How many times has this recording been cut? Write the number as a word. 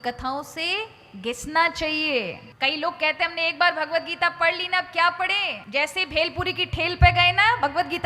two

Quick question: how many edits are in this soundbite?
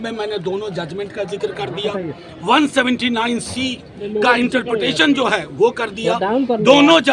zero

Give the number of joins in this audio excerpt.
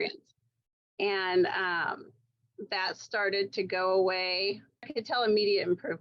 one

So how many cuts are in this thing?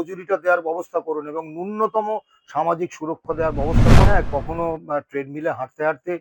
one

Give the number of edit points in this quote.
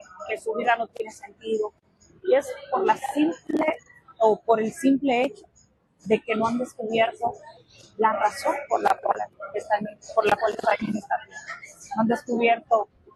zero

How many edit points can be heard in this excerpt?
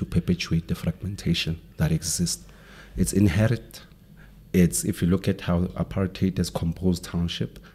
zero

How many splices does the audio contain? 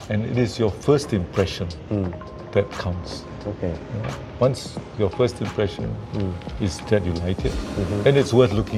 zero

